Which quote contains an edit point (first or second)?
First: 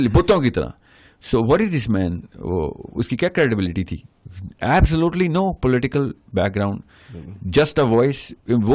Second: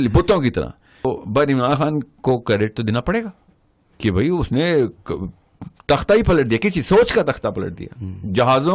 second